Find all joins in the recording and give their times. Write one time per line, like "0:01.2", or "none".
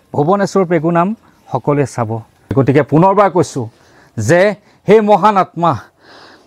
0:02.5

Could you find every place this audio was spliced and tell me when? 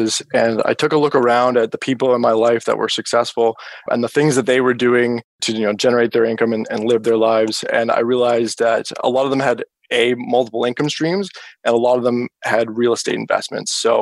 0:05.4

